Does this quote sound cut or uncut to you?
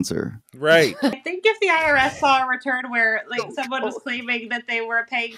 cut